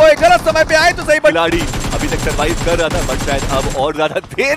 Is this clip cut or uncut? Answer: cut